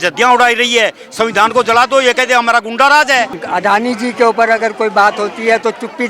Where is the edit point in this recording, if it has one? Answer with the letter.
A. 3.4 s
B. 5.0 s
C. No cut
A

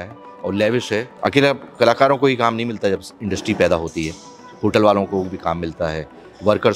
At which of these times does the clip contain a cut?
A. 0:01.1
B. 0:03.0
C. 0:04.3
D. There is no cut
A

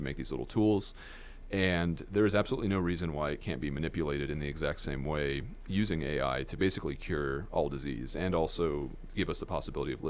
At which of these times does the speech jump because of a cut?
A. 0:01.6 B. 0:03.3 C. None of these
C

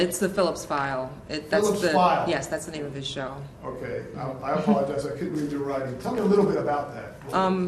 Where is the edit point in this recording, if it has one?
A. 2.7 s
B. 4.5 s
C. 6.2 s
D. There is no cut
A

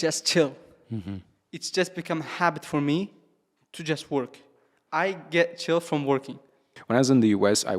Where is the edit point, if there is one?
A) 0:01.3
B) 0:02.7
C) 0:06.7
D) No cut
C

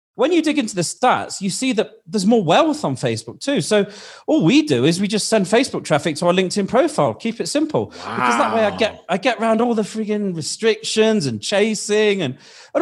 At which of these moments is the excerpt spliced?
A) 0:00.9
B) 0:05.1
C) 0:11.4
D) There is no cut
A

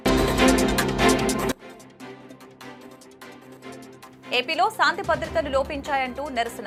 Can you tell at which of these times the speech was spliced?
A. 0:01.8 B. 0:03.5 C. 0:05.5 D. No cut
D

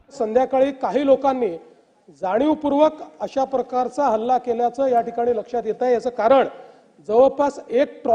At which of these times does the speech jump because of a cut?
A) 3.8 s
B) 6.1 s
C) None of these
C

